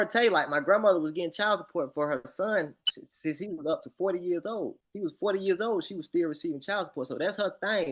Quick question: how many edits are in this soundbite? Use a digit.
1